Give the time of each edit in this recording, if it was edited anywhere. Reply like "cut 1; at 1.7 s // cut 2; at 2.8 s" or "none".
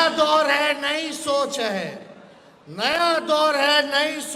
none